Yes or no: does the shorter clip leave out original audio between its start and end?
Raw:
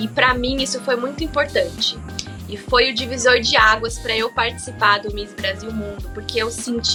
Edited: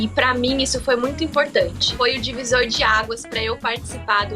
yes